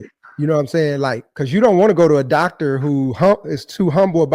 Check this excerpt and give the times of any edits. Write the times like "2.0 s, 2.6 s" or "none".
1.3 s